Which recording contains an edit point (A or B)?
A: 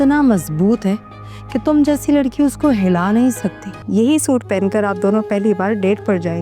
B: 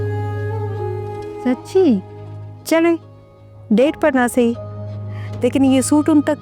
A